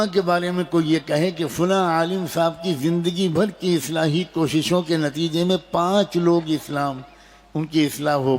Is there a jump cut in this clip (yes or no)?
no